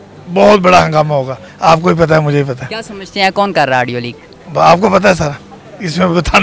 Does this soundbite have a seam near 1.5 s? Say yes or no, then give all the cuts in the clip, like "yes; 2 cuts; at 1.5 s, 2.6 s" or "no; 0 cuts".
yes; 1 cut; at 1.5 s